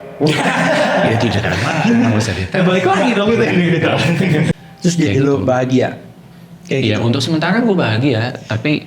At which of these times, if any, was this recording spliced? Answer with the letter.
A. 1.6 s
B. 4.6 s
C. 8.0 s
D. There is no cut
B